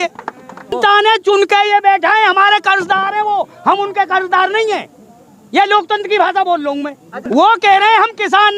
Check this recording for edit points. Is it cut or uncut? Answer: cut